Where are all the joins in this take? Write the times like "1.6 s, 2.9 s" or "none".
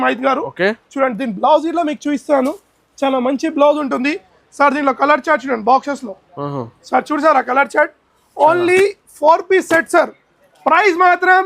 none